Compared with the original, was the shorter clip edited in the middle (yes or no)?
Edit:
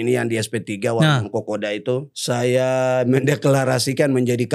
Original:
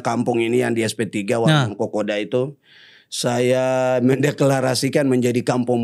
yes